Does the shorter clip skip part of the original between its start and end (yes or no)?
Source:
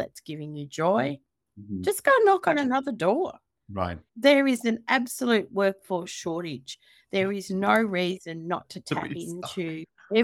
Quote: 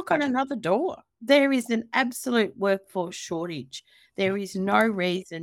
yes